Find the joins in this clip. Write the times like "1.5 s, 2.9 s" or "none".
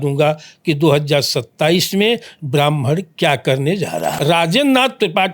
4.2 s